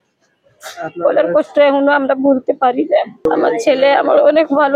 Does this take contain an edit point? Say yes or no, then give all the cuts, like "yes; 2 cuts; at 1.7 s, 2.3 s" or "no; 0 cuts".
no; 0 cuts